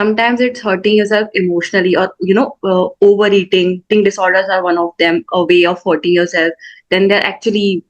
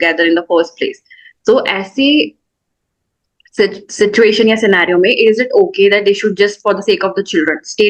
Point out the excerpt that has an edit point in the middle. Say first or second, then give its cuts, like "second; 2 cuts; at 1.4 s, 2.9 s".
first; 1 cut; at 3.9 s